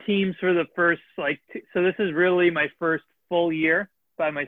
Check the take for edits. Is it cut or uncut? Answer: uncut